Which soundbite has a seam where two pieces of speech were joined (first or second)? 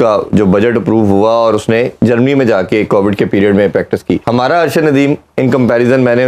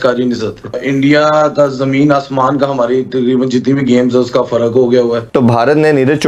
second